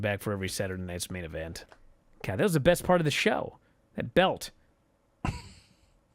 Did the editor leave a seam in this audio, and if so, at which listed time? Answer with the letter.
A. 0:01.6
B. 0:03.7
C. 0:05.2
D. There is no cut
A